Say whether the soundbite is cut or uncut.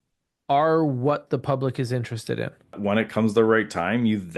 cut